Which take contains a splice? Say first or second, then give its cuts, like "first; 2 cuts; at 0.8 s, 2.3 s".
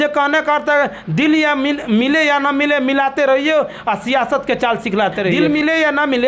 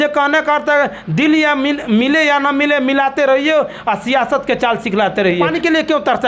second; 1 cut; at 5.4 s